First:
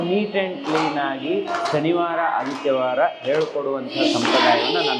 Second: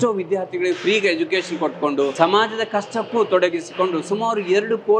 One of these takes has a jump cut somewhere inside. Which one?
second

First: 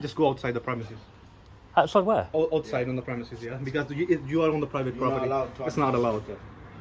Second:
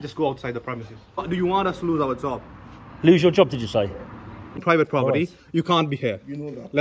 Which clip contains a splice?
second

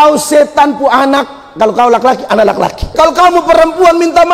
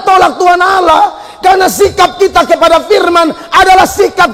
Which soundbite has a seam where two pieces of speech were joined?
first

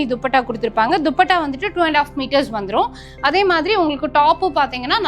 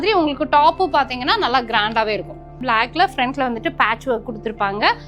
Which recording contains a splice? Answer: second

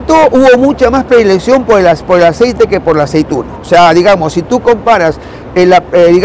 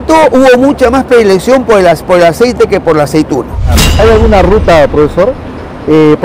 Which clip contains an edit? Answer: second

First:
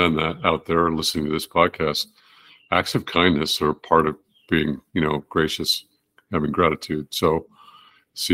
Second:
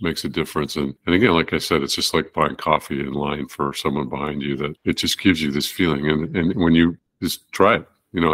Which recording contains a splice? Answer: second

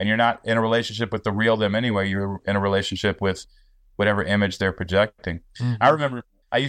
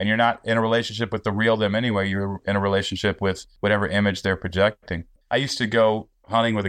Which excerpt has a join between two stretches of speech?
second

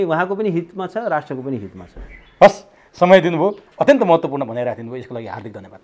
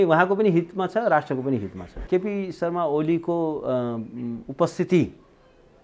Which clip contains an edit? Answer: second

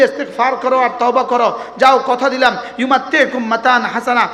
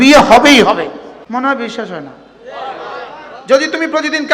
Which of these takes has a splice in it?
second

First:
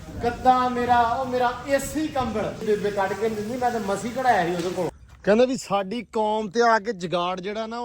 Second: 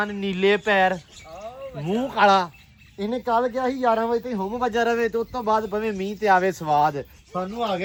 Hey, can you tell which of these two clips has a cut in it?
first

